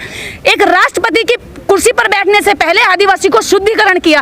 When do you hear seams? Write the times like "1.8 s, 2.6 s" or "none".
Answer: none